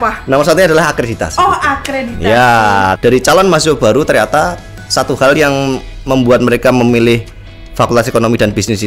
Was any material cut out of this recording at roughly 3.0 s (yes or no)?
yes